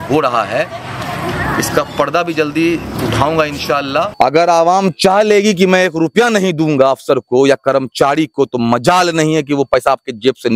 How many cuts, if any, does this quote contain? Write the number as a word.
one